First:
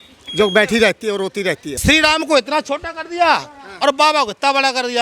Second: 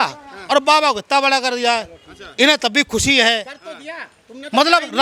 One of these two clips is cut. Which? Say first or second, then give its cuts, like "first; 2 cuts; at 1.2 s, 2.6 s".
first; 1 cut; at 1.7 s